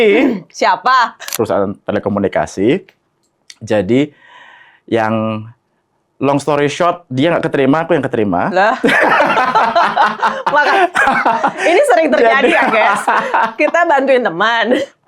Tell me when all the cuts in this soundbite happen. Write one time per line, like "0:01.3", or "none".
0:01.3